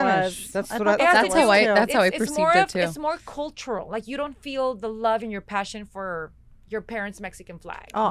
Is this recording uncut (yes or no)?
yes